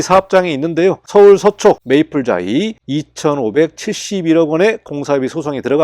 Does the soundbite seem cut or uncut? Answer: cut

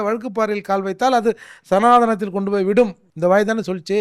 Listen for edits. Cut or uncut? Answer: cut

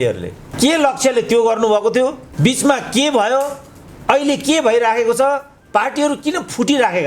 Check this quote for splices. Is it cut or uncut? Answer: cut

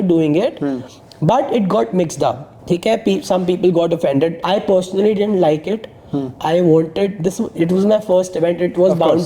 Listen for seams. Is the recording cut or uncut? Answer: cut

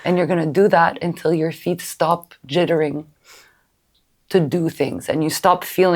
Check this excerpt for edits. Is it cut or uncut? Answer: uncut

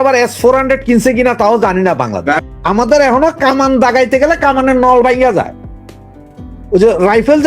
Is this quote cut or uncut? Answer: cut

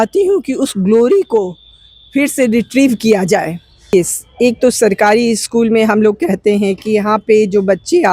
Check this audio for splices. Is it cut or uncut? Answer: cut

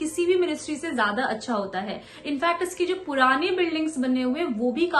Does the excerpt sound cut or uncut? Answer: uncut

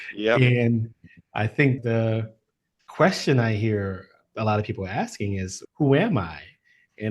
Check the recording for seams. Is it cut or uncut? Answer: cut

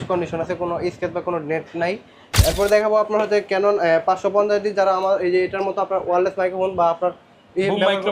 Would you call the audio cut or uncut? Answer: cut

